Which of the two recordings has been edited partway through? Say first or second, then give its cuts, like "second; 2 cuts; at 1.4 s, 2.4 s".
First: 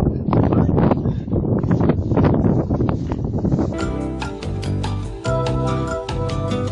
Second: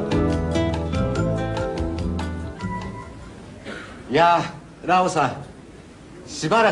first; 1 cut; at 3.7 s